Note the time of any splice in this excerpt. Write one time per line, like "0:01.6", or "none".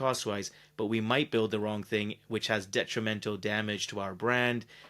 none

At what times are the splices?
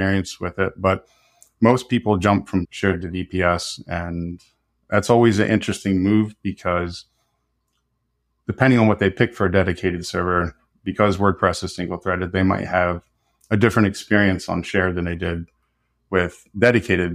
0:02.7

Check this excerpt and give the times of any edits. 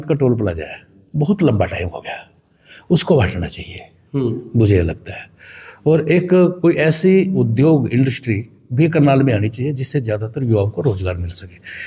none

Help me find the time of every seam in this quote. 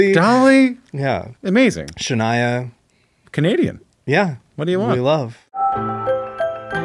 0:05.4

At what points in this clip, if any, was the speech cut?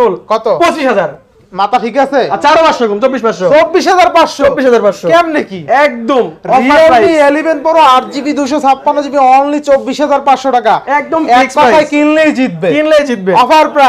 none

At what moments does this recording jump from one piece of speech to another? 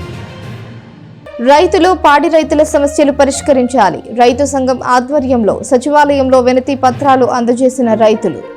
0:01.1

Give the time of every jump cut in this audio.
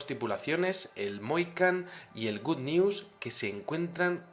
0:01.6

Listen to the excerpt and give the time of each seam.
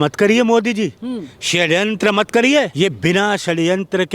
0:02.7

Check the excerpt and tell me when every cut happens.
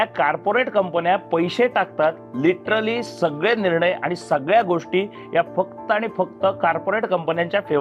none

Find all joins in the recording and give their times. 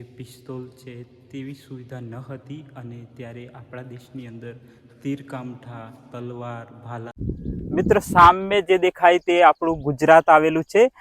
0:07.1

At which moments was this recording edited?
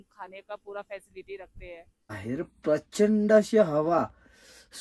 0:02.2

